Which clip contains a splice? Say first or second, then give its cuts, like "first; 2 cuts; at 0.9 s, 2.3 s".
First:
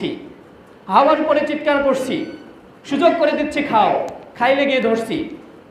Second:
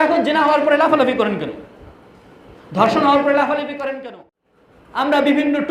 second; 1 cut; at 4.0 s